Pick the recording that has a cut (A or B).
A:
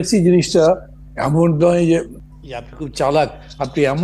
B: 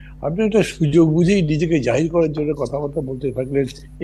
A